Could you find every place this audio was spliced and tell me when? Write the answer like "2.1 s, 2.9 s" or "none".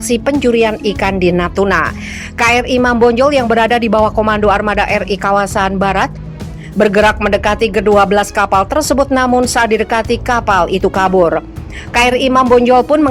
none